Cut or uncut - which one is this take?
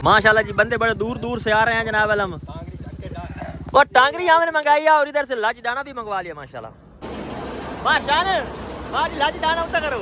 cut